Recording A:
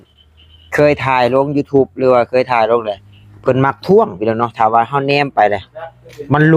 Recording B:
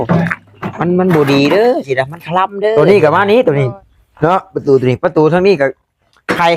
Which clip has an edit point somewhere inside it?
B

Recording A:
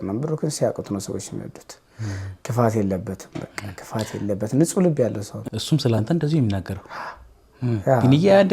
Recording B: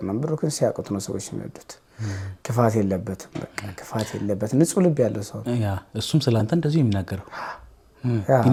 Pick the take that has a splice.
A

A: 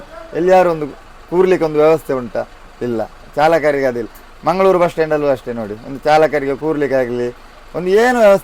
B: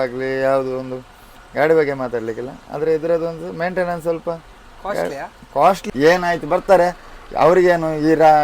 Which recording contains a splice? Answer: B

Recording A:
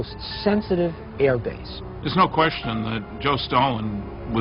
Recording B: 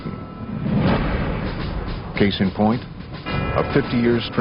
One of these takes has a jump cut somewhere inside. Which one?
A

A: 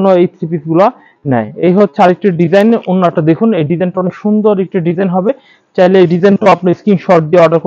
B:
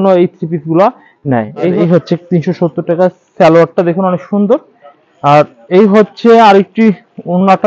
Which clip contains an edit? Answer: B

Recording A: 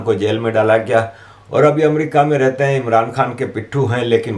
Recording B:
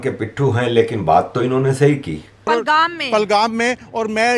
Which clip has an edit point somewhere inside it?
B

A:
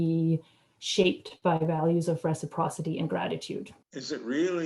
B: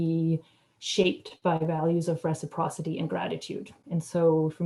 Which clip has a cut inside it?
A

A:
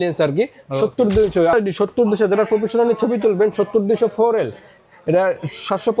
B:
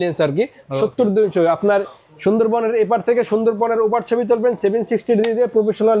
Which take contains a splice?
A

